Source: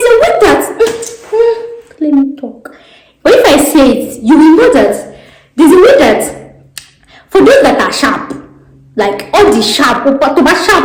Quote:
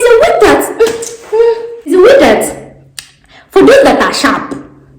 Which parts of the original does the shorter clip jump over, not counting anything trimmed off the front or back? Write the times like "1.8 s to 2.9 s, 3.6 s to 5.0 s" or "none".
1.9 s to 5.7 s